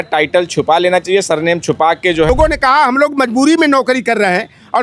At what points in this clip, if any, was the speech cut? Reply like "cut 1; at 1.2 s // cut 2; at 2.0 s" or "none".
cut 1; at 2.3 s